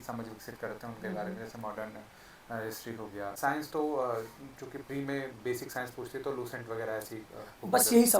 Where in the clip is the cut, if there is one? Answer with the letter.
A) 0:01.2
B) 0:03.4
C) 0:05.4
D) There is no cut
B